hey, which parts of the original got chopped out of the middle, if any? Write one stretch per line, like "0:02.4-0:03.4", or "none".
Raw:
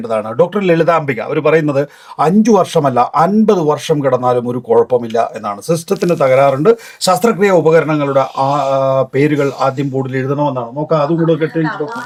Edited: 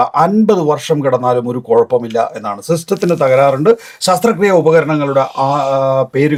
none